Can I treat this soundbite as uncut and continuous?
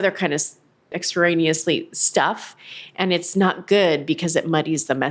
no; 1 cut; at 1.0 s

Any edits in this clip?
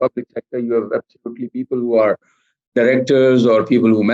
no; 0 cuts

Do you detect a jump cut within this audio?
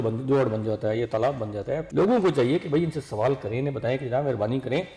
yes; 1 cut; at 1.8 s

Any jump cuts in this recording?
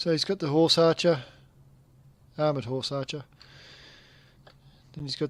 no; 0 cuts

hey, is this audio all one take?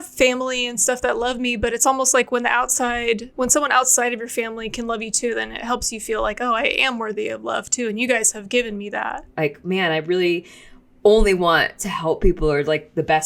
no; 1 cut; at 9.2 s

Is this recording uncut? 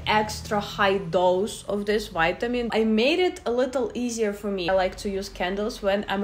no; 2 cuts; at 2.7 s, 4.7 s

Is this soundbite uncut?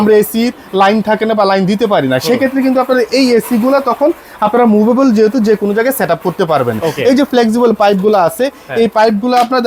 yes; 0 cuts

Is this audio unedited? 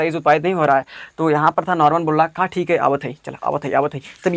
yes; 0 cuts

